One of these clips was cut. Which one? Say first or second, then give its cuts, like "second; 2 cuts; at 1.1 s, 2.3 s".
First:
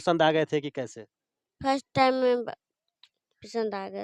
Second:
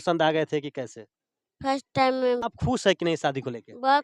second; 1 cut; at 2.4 s